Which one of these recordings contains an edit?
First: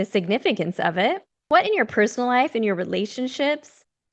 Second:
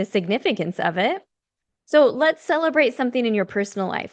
first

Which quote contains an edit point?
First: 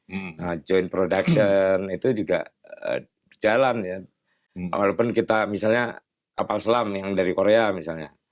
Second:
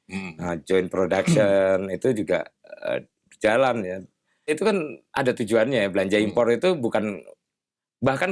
second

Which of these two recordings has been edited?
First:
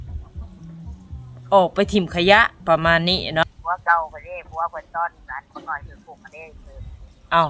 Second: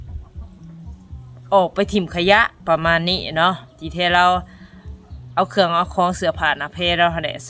first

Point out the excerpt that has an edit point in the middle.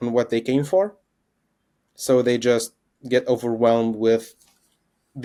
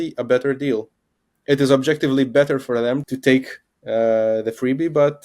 second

